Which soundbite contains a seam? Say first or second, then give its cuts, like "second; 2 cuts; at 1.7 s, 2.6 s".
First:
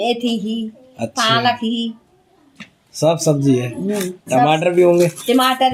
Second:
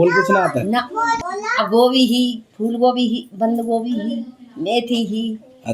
second; 1 cut; at 1.2 s